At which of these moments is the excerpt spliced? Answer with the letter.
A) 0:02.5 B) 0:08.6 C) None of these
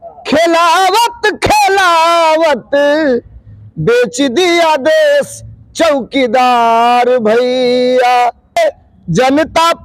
B